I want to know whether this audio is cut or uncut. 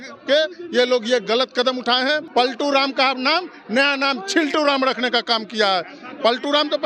cut